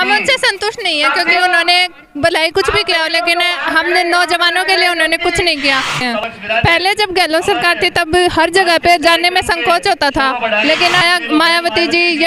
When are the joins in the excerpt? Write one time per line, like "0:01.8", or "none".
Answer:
0:06.0
0:11.0